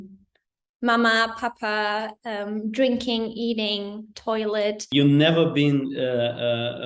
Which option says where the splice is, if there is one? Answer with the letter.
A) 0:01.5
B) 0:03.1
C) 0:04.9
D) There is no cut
C